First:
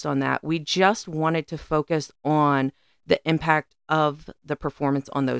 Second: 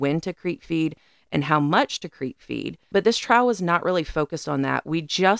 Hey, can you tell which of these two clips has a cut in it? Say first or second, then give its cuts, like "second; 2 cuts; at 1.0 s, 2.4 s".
second; 1 cut; at 2.9 s